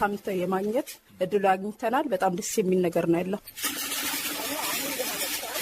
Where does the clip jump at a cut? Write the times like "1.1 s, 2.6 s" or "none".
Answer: 1.0 s